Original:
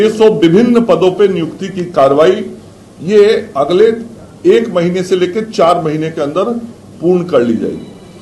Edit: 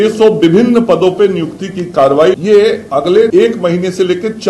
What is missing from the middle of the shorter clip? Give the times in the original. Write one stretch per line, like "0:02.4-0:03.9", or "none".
0:02.4-0:03.0
0:03.9-0:04.4